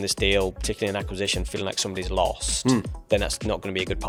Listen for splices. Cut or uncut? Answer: uncut